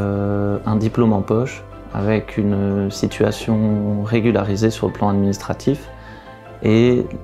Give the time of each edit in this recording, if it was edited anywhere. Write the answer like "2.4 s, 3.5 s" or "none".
none